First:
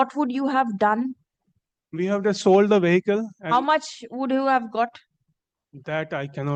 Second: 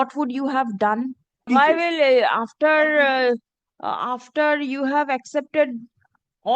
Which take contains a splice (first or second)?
second